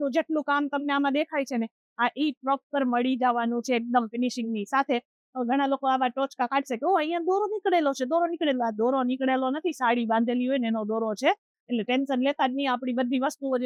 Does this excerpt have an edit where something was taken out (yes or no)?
no